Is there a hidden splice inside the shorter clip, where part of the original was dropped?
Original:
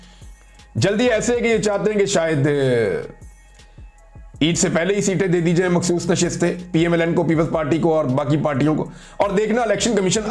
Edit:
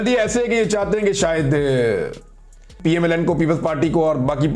yes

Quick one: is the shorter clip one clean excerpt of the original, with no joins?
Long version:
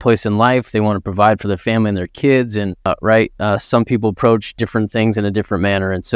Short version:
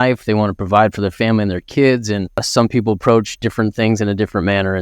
no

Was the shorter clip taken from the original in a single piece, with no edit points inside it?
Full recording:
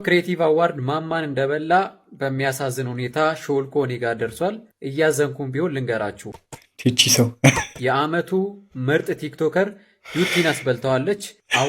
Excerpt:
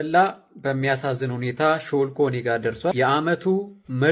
no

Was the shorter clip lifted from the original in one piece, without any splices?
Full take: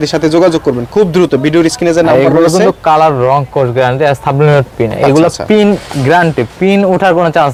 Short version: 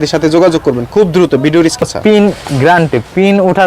no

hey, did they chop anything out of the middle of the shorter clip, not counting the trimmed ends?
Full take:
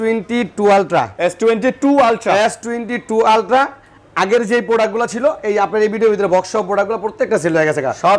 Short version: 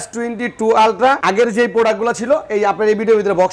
yes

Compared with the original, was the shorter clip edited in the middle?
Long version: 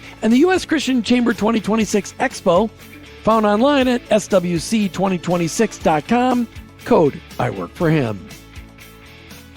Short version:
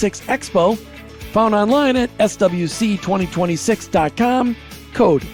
no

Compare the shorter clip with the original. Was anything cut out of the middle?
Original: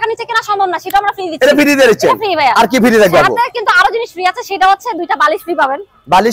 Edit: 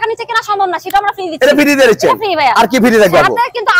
no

